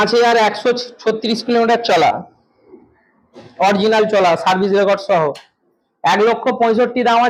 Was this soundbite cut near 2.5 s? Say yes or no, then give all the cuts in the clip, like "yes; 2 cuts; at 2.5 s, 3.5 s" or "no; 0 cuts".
no; 0 cuts